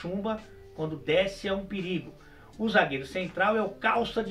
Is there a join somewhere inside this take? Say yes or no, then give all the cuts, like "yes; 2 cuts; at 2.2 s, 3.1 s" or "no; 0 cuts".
no; 0 cuts